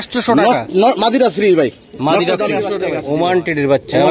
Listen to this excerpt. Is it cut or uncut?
cut